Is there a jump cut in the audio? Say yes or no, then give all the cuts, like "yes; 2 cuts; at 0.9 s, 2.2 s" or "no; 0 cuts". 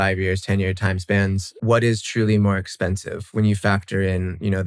yes; 1 cut; at 1.6 s